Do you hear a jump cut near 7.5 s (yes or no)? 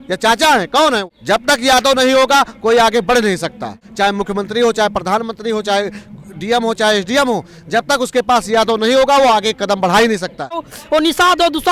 no